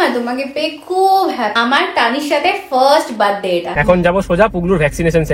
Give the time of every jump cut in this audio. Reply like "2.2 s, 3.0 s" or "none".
1.6 s, 3.8 s

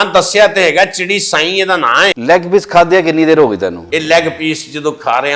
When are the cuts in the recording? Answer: 2.2 s, 3.8 s

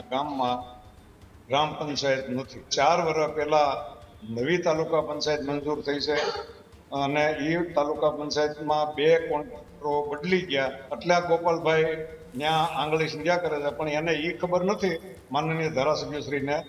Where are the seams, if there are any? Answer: 2.7 s, 10.9 s

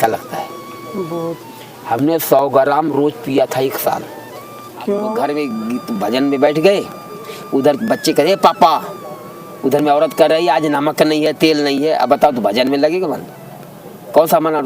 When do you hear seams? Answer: 5.1 s

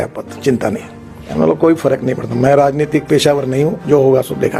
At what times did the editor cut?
1.2 s

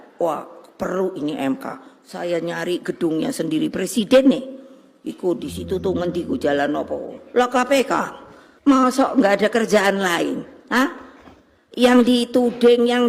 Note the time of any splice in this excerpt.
7.2 s

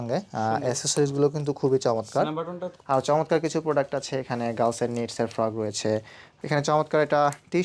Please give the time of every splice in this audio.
2.7 s, 6.2 s

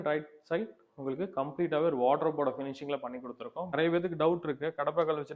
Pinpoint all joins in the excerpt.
3.7 s

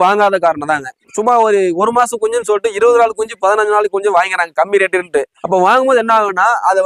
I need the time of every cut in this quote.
none

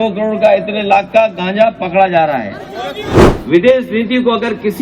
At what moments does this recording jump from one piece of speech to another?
3.0 s

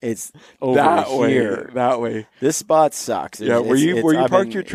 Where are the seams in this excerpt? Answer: none

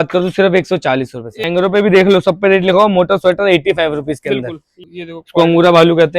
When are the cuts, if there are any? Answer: 1.4 s, 4.7 s

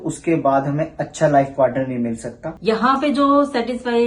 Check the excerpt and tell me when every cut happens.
2.4 s

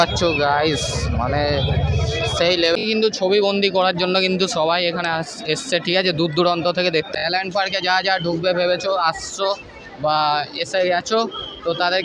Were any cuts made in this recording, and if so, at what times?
2.8 s, 7.1 s

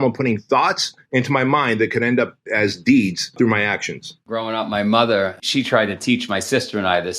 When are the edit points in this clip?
0.9 s, 3.8 s, 5.4 s

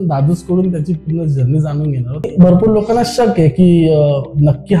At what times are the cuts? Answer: 2.3 s

